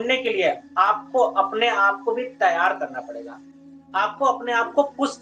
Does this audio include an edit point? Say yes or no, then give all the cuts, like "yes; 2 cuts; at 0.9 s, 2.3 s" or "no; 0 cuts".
no; 0 cuts